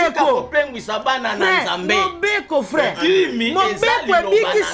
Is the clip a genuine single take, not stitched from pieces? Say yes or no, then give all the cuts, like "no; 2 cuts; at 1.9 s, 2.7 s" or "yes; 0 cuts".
yes; 0 cuts